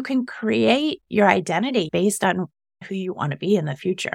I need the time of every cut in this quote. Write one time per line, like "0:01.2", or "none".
0:01.9